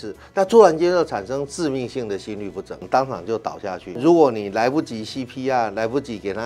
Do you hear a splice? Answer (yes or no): yes